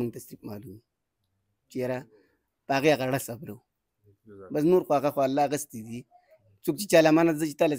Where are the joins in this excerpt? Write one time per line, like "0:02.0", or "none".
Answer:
none

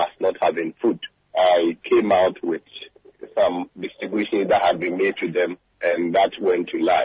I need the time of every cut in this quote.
0:01.1
0:05.7

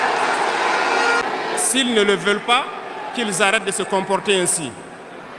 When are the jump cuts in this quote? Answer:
0:01.2

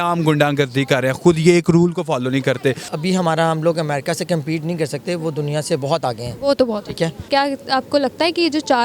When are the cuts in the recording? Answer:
0:02.9
0:07.3

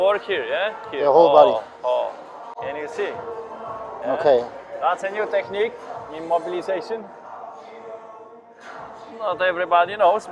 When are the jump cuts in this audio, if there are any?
none

